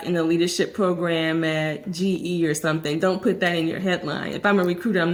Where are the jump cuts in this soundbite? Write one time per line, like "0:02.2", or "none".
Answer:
none